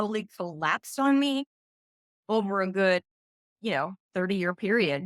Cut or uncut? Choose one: uncut